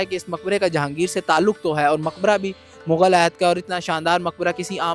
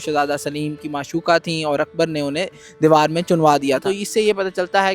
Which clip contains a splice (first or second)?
second